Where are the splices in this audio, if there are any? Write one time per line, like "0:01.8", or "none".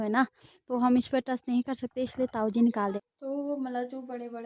0:03.0